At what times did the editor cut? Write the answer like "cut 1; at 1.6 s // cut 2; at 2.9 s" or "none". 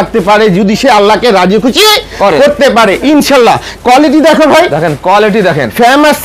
none

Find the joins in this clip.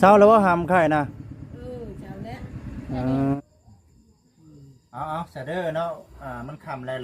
cut 1; at 3.4 s

